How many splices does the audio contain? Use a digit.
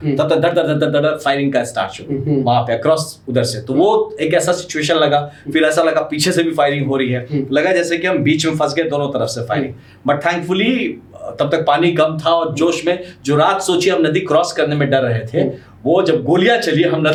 0